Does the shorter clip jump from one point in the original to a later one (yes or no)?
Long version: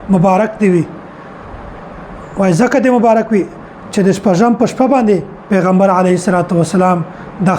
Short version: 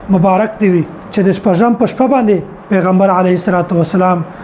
yes